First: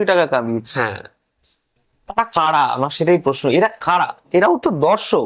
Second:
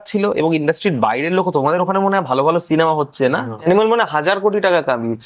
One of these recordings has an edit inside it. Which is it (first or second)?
second